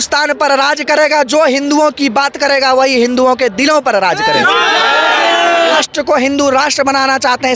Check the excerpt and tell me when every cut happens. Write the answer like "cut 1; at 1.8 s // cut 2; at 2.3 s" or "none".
cut 1; at 5.8 s